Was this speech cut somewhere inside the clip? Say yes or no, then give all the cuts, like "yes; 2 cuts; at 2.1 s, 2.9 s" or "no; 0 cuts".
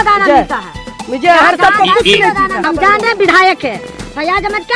yes; 1 cut; at 2.6 s